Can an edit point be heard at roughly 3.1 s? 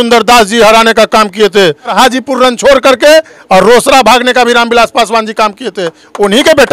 no; 1 cut; at 1.9 s

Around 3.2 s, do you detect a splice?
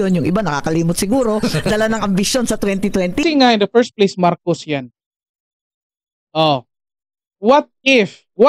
yes; 1 cut; at 3.2 s

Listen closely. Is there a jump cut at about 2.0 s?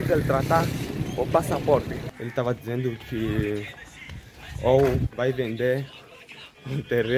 yes; 1 cut; at 2.0 s

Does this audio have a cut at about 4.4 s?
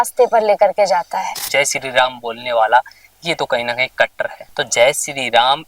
yes; 2 cuts; at 1.4 s, 4.4 s

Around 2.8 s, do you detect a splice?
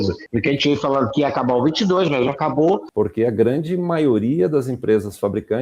yes; 1 cut; at 2.8 s

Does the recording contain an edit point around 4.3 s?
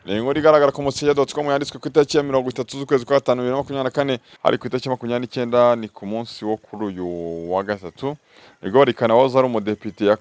yes; 1 cut; at 4.3 s

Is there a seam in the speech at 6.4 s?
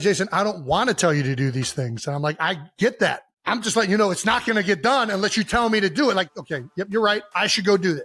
yes; 1 cut; at 6.4 s

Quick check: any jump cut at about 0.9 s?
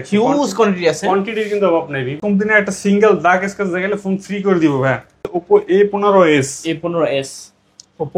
no; 2 cuts; at 2.2 s, 5.4 s

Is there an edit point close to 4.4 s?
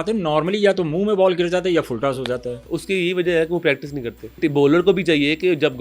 yes; 1 cut; at 4.4 s

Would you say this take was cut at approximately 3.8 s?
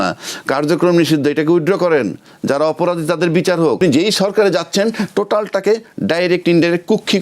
yes; 1 cut; at 3.8 s

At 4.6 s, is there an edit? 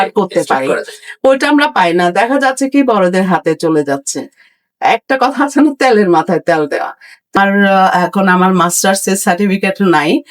no; 1 cut; at 7.4 s

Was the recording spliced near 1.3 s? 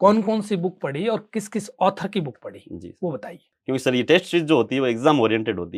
no; 1 cut; at 3.4 s

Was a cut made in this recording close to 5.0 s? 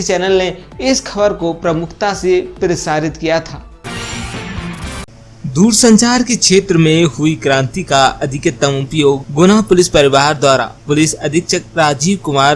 yes; 2 cuts; at 3.7 s, 5.0 s

